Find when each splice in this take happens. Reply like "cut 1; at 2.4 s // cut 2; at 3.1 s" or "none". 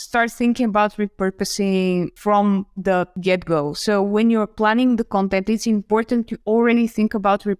cut 1; at 2.1 s // cut 2; at 3.1 s